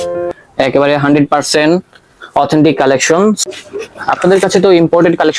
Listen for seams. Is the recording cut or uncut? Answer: cut